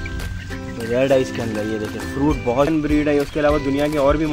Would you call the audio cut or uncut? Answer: cut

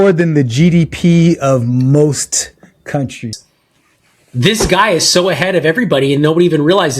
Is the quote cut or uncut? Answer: cut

